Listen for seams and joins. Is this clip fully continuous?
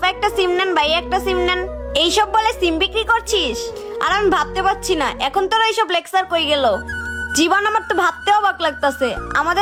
yes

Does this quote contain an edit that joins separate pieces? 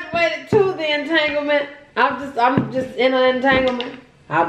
no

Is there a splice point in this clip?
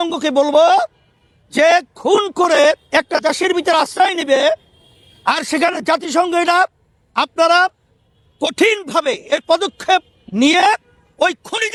no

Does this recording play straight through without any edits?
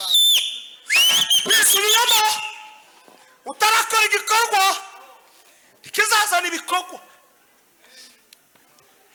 yes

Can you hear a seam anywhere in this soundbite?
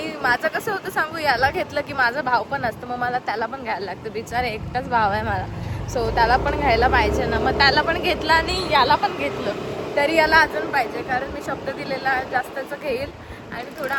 no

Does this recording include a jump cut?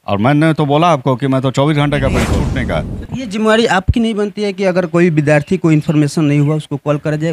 yes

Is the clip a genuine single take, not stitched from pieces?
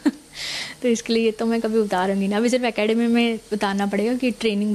yes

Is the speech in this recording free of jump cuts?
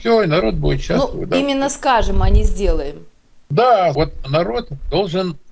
no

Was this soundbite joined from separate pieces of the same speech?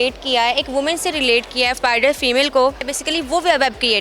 yes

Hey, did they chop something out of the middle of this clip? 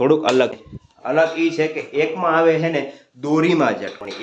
no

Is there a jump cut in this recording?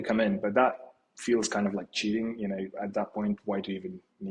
no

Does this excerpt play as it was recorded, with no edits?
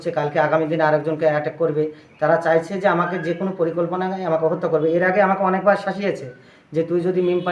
yes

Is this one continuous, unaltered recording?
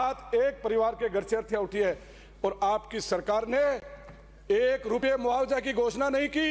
yes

